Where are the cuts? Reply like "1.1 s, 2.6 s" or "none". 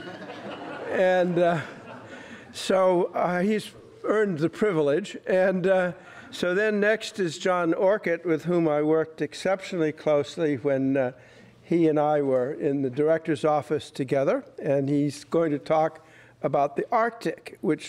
12.8 s